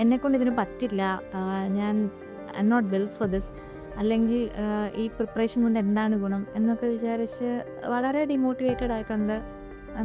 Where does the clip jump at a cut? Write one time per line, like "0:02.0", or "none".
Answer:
none